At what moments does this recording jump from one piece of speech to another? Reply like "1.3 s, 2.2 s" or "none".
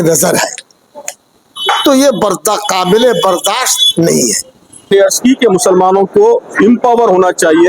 4.9 s